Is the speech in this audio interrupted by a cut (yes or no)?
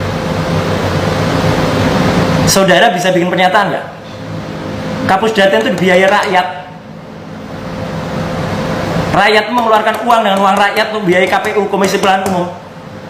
no